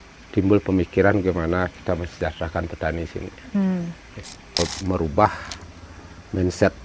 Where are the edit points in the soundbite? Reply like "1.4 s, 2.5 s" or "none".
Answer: 4.6 s